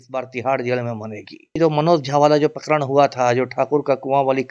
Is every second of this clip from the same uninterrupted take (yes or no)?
no